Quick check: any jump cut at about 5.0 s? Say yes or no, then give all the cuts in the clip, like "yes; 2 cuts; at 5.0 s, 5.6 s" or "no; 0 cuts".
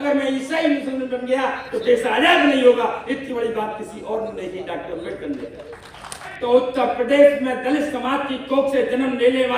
no; 1 cut; at 6.3 s